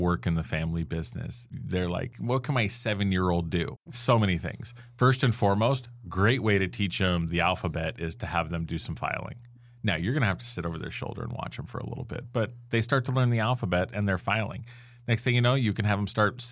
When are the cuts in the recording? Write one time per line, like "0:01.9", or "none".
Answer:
0:02.1
0:03.8